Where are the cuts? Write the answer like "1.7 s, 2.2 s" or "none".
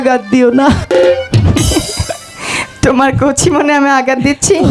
none